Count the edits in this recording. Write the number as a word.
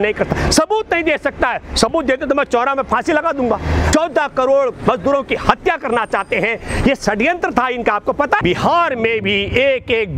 two